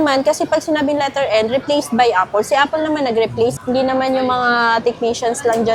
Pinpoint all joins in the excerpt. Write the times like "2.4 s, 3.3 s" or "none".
none